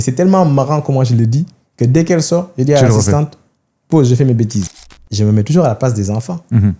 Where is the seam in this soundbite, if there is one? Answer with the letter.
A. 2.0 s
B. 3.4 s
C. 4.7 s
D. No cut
C